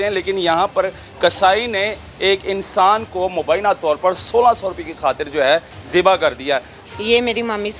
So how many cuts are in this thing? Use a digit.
1